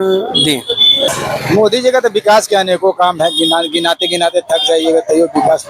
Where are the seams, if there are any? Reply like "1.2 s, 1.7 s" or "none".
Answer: 1.1 s